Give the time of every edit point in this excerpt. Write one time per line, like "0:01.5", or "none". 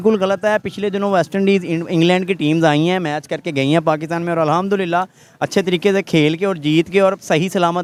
none